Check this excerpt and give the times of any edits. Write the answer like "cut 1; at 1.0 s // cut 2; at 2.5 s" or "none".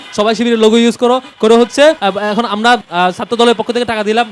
cut 1; at 2.0 s // cut 2; at 2.9 s